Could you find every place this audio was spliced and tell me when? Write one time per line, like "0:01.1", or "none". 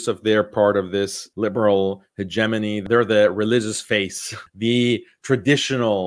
0:01.2
0:02.8
0:04.4